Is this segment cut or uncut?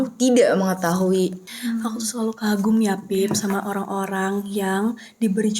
cut